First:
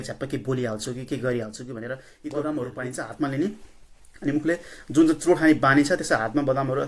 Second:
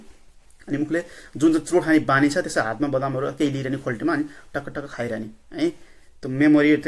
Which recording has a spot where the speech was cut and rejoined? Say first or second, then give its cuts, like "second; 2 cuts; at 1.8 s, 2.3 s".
first; 1 cut; at 2.1 s